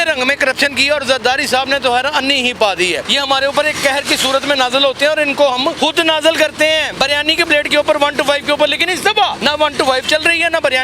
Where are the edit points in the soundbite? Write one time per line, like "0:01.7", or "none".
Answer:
0:03.1
0:05.8
0:06.9
0:09.4